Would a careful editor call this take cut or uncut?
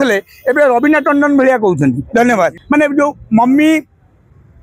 cut